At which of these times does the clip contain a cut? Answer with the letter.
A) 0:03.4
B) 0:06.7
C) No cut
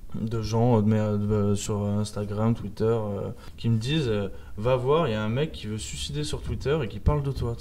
A